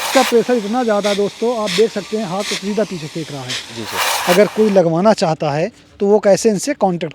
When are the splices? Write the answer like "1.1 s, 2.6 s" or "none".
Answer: 4.1 s